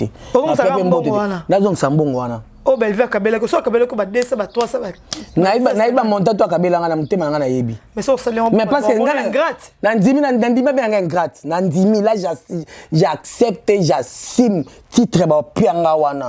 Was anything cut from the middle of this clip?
no; 0 cuts

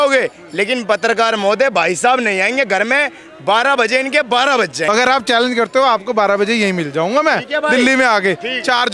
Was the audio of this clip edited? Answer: yes; 1 cut; at 4.8 s

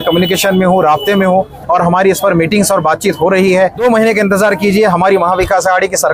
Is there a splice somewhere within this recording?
yes; 1 cut; at 3.8 s

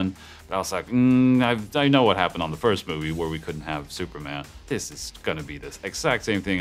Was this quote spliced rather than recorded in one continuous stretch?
yes; 1 cut; at 4.5 s

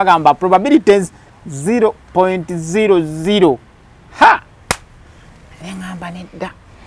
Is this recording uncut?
yes; 0 cuts

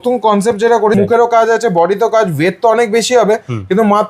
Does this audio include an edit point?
yes; 1 cut; at 1.0 s

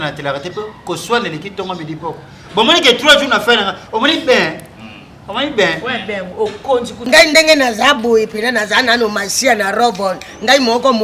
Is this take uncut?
no; 1 cut; at 7.1 s

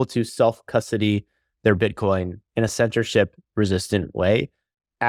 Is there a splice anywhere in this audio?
no; 0 cuts

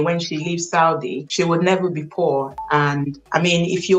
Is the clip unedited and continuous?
yes; 0 cuts

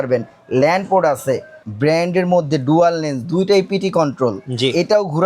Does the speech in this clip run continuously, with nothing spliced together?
no; 1 cut; at 1.6 s

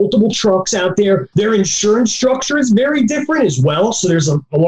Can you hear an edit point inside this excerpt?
yes; 1 cut; at 1.3 s

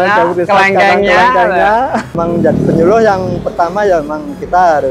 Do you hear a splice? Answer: yes; 1 cut; at 2.1 s

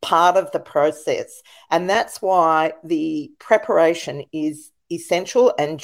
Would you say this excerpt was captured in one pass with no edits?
yes; 0 cuts

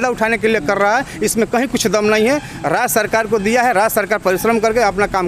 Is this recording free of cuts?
yes; 0 cuts

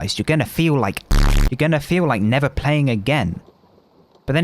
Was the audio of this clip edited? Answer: yes; 1 cut; at 1.1 s

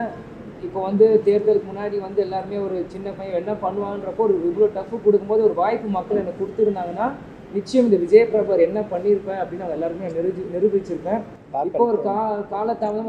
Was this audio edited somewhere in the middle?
no; 0 cuts

